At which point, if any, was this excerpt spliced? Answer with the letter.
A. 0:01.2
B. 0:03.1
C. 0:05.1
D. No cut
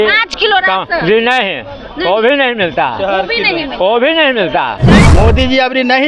C